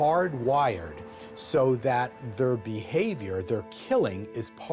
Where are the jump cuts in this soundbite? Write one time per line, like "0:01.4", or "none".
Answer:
none